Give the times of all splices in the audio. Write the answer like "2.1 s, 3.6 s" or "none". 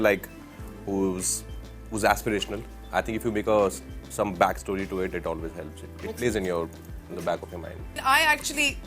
8.0 s